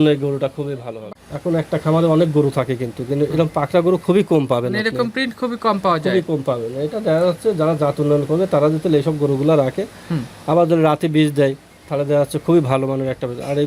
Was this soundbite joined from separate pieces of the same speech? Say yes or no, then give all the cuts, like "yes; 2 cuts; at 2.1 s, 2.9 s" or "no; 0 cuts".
yes; 1 cut; at 0.9 s